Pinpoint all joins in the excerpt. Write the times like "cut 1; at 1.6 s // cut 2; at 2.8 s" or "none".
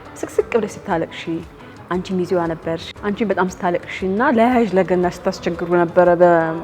cut 1; at 2.9 s